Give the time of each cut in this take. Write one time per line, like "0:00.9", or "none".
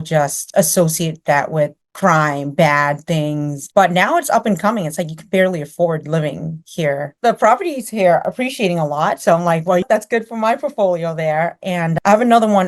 0:03.6
0:07.1